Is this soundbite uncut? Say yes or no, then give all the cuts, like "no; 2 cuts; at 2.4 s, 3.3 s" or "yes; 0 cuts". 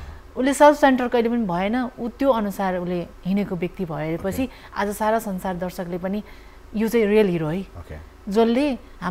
yes; 0 cuts